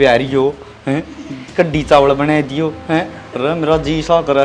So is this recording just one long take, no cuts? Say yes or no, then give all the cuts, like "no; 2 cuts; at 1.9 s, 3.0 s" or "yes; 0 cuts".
yes; 0 cuts